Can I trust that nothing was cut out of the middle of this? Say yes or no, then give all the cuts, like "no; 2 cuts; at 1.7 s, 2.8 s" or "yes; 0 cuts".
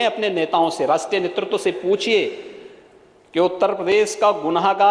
yes; 0 cuts